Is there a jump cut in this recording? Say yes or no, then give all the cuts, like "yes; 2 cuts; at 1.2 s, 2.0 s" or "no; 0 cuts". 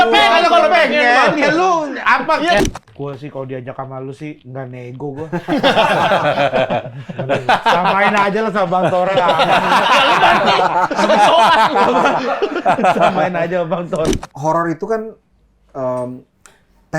yes; 2 cuts; at 2.6 s, 14.1 s